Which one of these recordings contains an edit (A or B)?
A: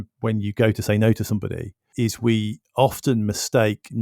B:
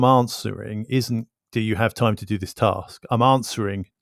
A